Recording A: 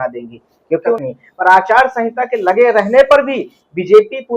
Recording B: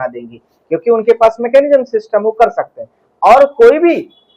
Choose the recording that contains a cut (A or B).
A